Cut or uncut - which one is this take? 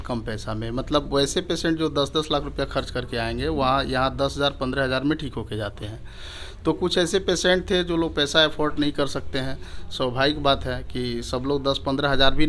uncut